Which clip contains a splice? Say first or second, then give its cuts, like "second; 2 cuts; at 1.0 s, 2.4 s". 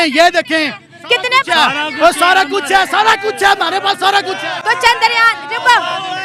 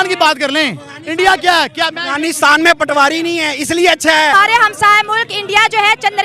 second; 1 cut; at 4.3 s